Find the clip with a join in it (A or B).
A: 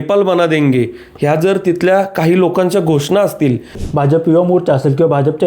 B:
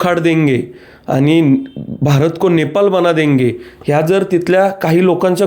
A